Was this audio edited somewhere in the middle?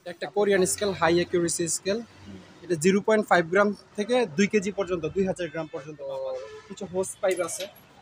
yes; 1 cut; at 5.9 s

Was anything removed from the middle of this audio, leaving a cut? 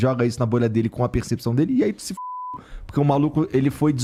no; 0 cuts

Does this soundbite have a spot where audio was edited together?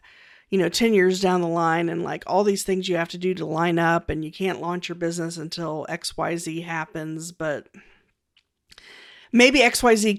no; 0 cuts

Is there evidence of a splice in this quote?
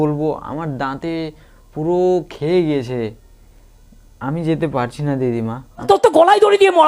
yes; 1 cut; at 5.7 s

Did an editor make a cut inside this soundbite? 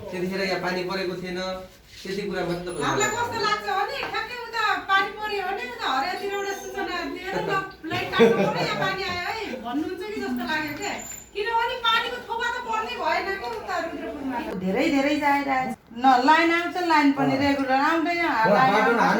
yes; 2 cuts; at 14.5 s, 15.8 s

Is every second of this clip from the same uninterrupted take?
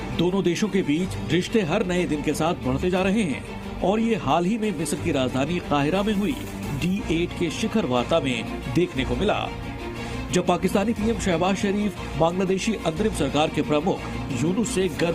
yes; 0 cuts

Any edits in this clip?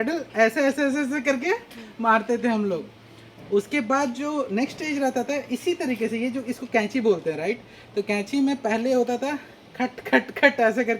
no; 0 cuts

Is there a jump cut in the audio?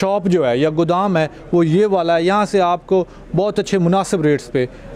no; 0 cuts

